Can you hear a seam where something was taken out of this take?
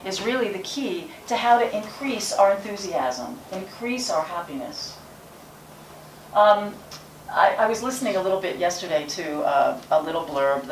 no; 0 cuts

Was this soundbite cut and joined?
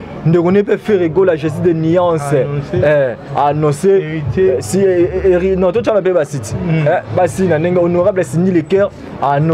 no; 0 cuts

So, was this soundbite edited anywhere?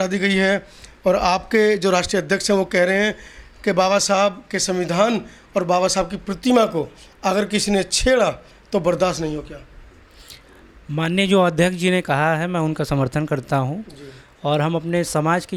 no; 0 cuts

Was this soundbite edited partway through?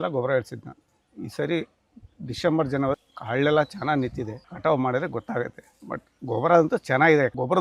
yes; 2 cuts; at 3.0 s, 4.4 s

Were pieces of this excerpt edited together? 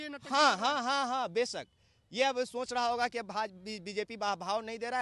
no; 0 cuts

